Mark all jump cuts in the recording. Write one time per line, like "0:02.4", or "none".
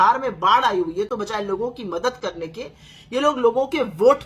none